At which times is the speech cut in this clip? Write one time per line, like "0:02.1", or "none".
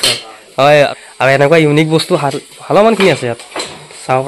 0:01.0